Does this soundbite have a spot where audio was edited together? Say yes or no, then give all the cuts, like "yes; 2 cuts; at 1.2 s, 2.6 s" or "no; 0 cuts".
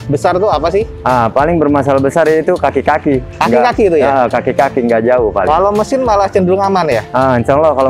no; 0 cuts